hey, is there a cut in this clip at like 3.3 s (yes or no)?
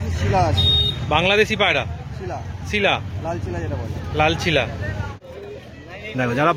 no